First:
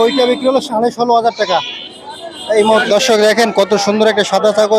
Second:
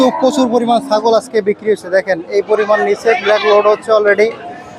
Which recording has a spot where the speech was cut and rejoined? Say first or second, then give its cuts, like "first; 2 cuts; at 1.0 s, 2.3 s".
first; 1 cut; at 2.8 s